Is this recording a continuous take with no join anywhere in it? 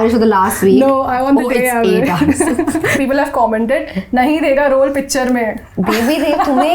no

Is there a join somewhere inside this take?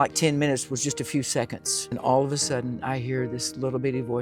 yes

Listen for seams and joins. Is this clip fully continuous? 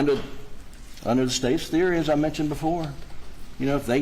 no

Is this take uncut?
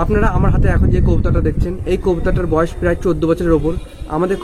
yes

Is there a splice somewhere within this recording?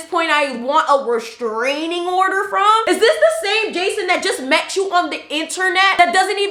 no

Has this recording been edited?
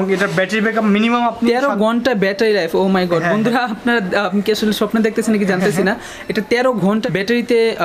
no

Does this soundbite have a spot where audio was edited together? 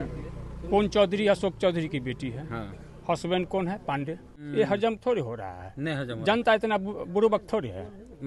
yes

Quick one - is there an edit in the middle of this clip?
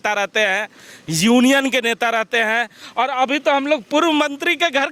no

